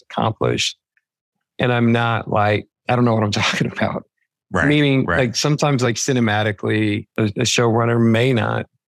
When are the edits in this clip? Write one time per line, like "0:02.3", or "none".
0:02.7
0:07.1